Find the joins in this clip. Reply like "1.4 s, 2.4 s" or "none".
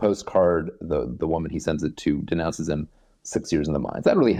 none